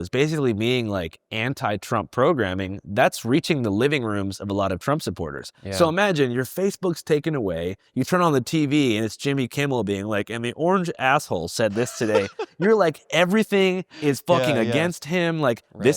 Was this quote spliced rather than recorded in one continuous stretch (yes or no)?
no